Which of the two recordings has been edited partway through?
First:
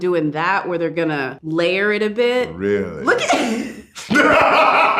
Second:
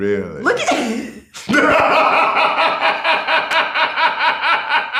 first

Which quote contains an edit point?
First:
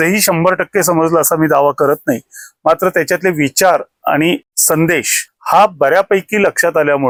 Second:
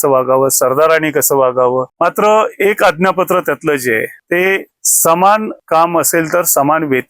second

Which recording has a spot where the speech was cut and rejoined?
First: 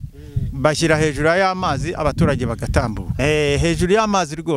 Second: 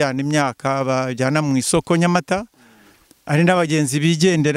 first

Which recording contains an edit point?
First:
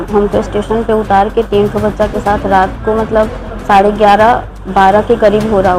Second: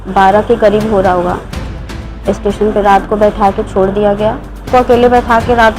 second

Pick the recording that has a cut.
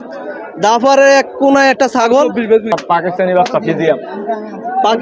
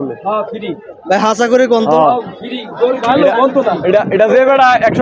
first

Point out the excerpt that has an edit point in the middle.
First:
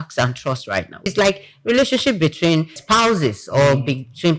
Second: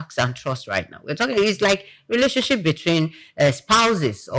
first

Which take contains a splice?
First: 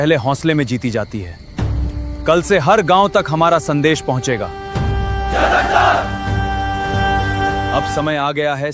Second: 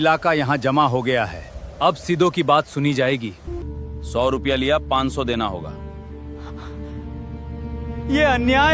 second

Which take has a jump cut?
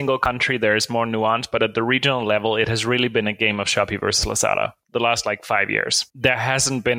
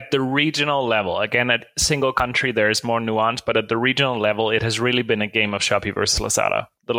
first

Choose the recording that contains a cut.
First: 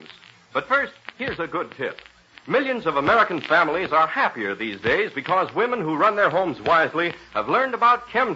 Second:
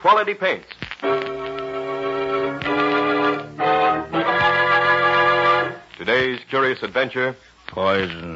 second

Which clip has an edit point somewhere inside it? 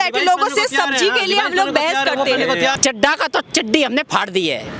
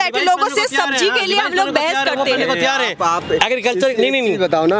first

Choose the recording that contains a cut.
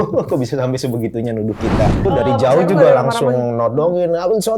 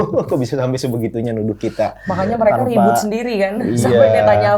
first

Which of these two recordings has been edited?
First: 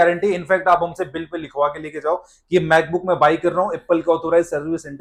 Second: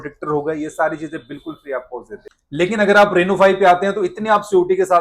second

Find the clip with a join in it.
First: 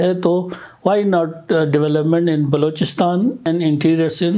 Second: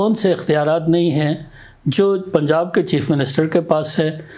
first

